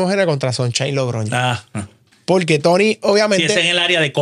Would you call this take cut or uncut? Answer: uncut